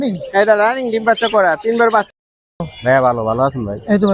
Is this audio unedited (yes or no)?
no